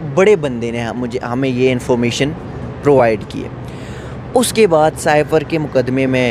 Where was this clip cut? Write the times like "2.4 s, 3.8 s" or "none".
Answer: none

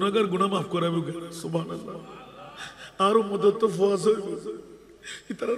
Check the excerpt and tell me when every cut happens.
none

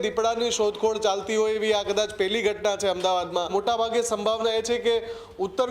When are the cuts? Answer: 3.5 s

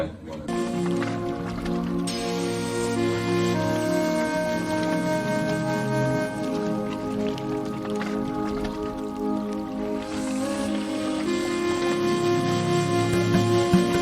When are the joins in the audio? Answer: none

